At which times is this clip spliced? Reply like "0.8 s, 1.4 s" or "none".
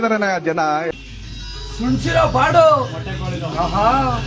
0.9 s